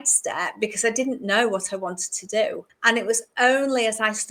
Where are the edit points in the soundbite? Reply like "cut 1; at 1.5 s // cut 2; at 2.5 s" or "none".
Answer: cut 1; at 2.7 s